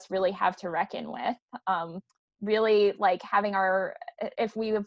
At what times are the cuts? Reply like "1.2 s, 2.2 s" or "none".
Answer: none